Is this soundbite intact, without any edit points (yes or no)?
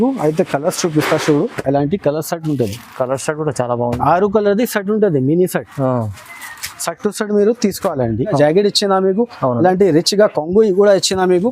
no